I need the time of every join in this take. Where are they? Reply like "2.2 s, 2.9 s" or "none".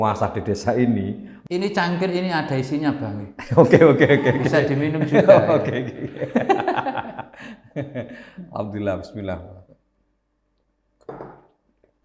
1.3 s